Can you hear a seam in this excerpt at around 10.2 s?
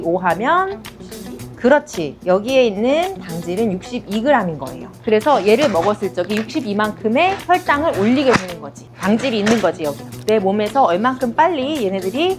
yes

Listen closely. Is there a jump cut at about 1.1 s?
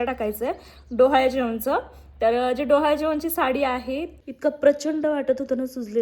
no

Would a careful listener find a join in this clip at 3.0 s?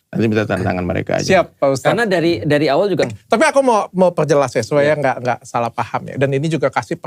yes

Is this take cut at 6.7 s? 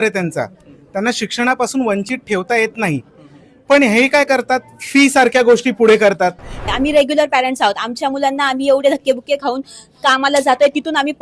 yes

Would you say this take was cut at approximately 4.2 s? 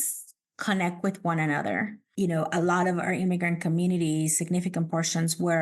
no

